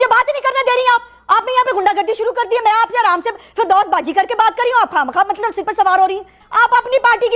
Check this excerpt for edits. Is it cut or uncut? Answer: cut